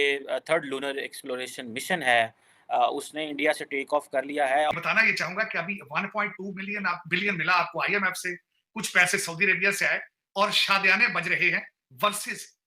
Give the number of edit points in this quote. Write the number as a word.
one